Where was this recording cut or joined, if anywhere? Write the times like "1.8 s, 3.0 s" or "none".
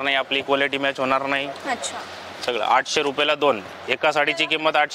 none